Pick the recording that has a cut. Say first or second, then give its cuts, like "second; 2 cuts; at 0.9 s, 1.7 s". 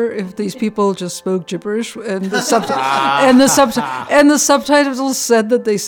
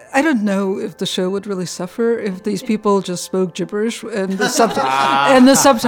second; 1 cut; at 1.0 s